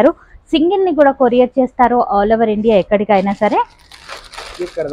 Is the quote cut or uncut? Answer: uncut